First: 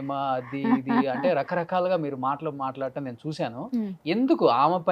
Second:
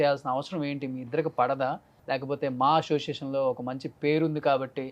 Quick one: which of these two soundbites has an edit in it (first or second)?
second